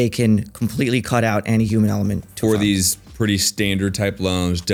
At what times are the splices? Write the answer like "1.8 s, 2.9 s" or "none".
none